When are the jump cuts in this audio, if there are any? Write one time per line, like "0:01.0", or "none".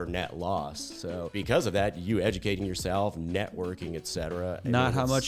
0:01.3